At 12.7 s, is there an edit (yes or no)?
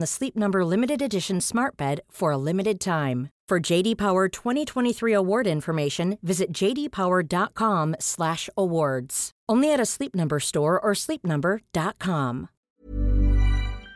yes